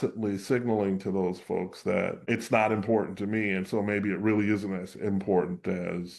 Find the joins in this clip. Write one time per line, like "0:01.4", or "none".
0:02.3